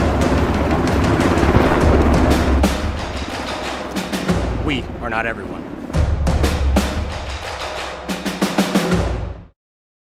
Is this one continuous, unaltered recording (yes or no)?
yes